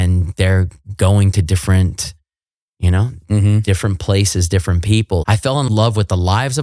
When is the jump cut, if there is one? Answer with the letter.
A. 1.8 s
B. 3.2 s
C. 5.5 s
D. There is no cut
C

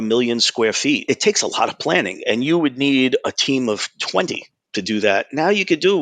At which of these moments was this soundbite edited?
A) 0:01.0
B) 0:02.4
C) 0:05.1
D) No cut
A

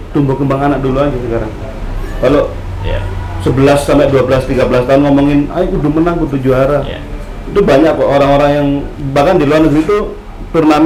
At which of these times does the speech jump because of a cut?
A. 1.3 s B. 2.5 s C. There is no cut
C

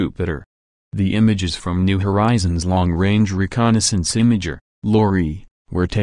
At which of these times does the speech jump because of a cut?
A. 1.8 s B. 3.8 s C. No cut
B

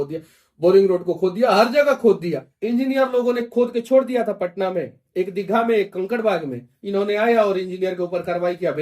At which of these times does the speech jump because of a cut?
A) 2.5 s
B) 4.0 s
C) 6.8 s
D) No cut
A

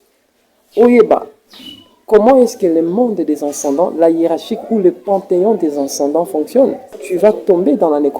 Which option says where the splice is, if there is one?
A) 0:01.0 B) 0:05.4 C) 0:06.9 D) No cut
C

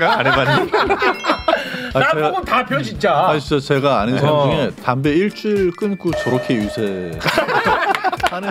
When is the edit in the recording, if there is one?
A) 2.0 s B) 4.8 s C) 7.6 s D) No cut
D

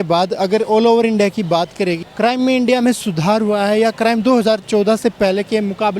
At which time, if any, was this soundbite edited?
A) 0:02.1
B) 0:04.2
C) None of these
A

